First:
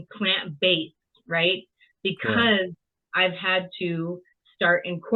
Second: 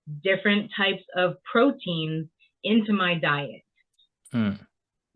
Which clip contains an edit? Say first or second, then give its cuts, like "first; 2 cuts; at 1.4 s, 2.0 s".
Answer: second; 1 cut; at 3.9 s